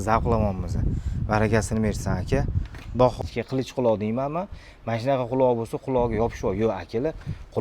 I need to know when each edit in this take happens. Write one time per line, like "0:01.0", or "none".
0:03.2